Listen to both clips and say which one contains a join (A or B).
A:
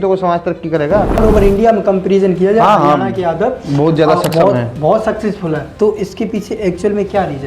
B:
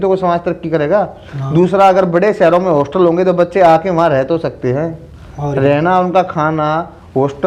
A